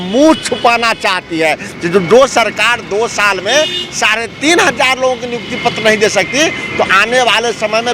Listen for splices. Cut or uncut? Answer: uncut